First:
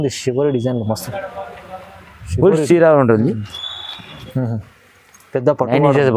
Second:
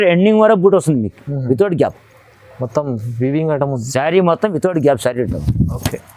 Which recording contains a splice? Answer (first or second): first